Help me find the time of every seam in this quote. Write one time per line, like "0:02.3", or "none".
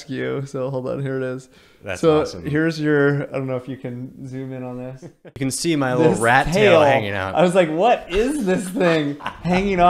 0:05.2